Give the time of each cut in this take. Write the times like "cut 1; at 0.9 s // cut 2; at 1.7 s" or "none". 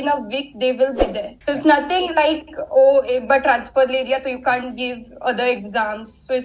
cut 1; at 1.3 s